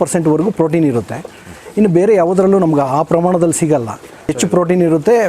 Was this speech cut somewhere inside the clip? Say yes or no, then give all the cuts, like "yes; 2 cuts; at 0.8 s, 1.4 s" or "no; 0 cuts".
no; 0 cuts